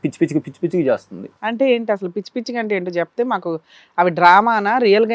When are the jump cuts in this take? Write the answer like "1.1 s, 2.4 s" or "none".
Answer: none